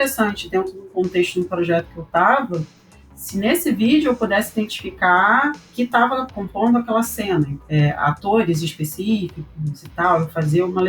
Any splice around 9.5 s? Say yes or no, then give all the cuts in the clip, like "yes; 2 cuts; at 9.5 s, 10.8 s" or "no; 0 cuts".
no; 2 cuts; at 6.2 s, 7.6 s